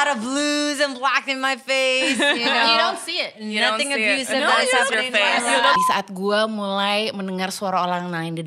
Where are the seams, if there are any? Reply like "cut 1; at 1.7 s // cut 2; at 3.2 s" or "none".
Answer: cut 1; at 5.8 s

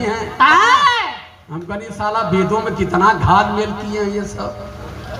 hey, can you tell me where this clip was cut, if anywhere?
none

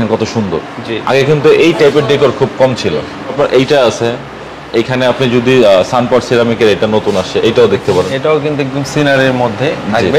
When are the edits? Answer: none

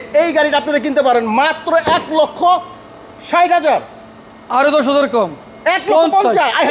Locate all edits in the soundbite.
none

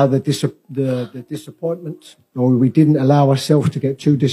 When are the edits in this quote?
none

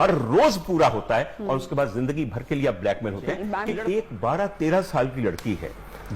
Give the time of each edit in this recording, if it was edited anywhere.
cut 1; at 3.7 s

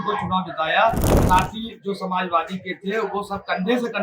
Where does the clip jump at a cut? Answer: cut 1; at 1.1 s

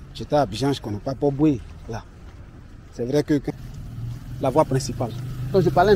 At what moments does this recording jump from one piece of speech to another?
cut 1; at 3.5 s

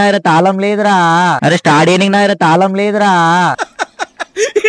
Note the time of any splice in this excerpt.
cut 1; at 1.4 s // cut 2; at 3.5 s

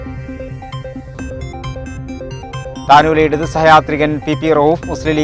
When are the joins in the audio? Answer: cut 1; at 1.0 s

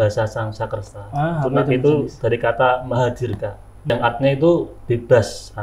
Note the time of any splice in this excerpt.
cut 1; at 3.9 s // cut 2; at 4.7 s

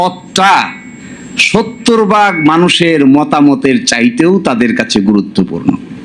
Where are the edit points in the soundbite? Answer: none

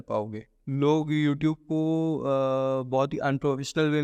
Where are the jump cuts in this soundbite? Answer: none

